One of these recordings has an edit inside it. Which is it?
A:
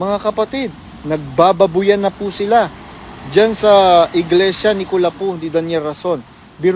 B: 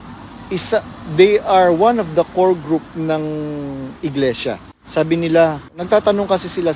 B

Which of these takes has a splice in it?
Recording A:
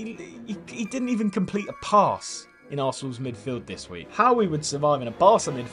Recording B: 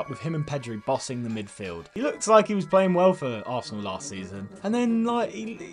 B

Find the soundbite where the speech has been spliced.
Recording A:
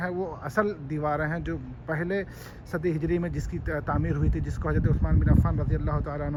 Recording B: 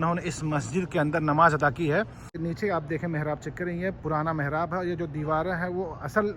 B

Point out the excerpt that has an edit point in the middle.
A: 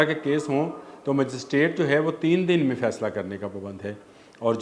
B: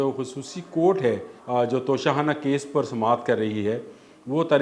B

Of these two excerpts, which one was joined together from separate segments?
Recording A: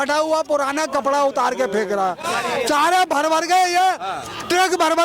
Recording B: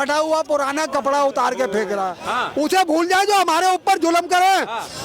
B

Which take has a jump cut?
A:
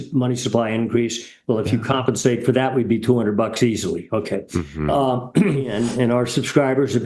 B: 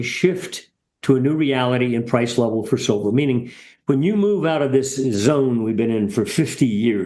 A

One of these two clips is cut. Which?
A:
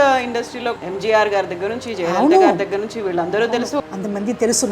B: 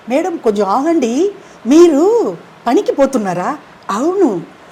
A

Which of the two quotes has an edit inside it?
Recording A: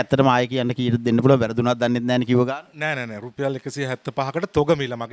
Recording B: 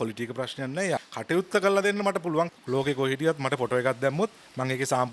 B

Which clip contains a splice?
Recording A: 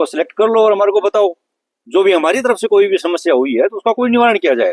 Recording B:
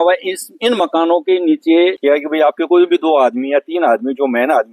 B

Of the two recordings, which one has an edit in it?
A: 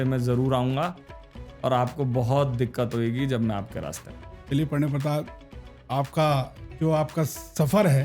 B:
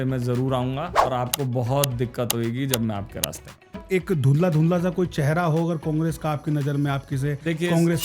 B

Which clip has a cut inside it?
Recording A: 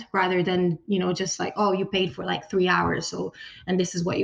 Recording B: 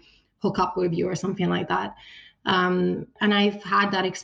B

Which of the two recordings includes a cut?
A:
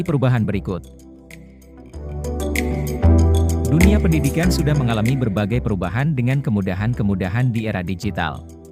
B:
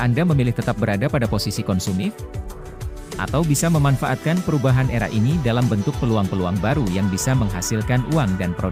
A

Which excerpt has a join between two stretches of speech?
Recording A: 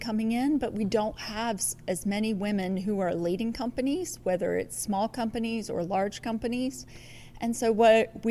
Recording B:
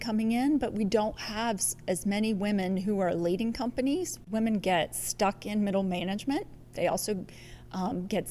B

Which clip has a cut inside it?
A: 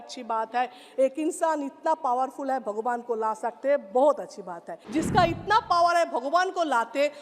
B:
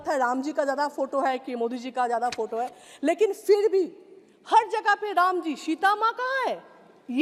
A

